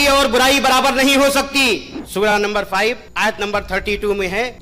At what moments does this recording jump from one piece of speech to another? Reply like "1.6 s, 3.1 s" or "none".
1.9 s